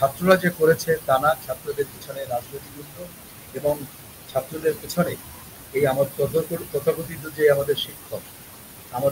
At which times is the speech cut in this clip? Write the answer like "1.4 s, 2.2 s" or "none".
none